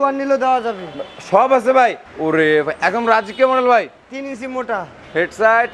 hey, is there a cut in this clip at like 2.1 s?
yes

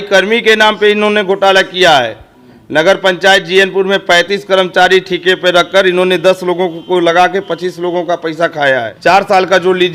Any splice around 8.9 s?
yes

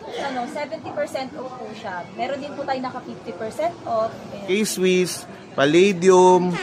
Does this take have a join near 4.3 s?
yes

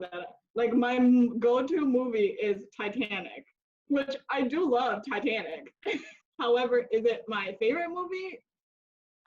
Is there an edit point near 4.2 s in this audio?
no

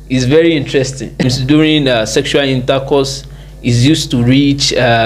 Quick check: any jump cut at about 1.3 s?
yes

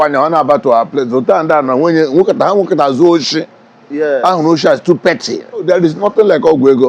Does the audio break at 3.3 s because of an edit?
no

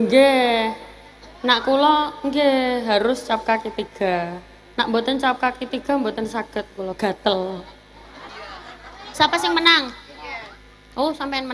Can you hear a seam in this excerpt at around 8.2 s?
yes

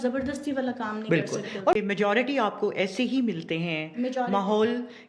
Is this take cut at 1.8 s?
yes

